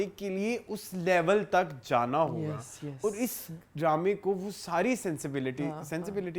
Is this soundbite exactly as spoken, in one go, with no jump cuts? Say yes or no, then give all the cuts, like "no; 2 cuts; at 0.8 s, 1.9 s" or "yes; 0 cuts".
yes; 0 cuts